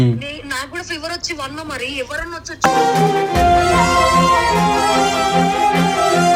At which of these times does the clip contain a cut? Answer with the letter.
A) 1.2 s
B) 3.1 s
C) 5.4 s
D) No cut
D